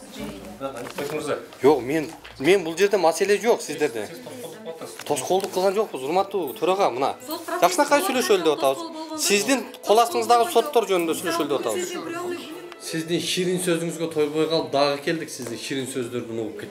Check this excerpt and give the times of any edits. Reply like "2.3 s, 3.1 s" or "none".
12.5 s